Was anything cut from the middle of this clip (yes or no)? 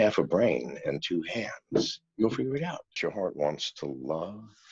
yes